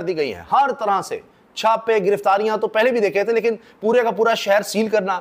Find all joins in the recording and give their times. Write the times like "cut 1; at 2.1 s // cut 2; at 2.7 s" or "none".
none